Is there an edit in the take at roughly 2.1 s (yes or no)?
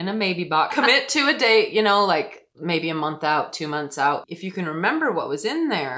no